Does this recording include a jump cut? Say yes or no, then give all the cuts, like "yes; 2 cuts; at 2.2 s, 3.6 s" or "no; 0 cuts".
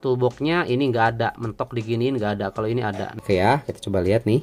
yes; 1 cut; at 3.1 s